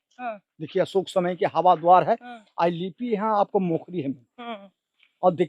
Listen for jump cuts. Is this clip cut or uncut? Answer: uncut